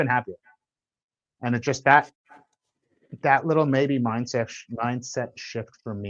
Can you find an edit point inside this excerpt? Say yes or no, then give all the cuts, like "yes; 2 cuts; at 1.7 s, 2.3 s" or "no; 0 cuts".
no; 0 cuts